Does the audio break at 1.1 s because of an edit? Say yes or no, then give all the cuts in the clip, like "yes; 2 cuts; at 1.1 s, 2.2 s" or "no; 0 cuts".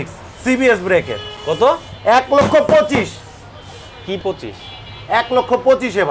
no; 0 cuts